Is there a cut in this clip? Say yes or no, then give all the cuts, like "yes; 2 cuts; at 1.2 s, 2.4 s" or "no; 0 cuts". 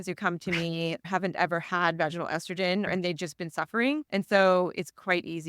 yes; 3 cuts; at 1.1 s, 2.9 s, 4.1 s